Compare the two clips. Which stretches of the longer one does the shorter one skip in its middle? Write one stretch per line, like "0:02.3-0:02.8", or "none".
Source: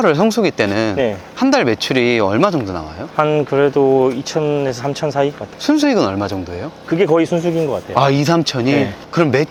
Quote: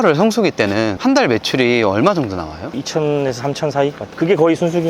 0:00.9-0:01.3
0:03.1-0:04.2
0:05.4-0:06.7